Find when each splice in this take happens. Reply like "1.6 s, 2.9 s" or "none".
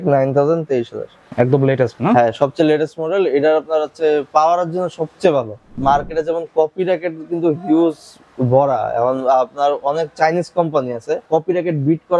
1.2 s, 5.7 s, 11.2 s